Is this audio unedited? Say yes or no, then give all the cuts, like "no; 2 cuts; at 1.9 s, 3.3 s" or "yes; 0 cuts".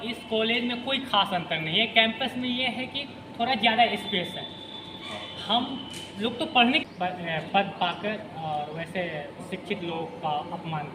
no; 1 cut; at 6.8 s